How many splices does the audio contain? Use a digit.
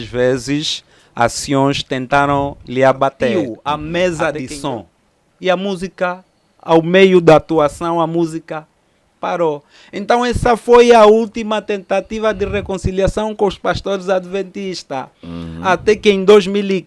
1